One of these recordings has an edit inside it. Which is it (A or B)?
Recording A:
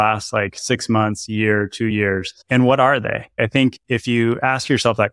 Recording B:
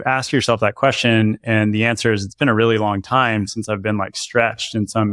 A